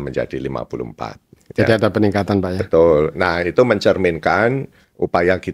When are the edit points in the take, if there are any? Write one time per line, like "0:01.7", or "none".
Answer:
none